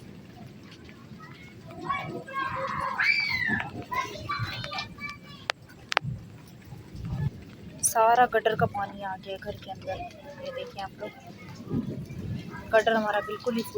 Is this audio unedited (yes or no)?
yes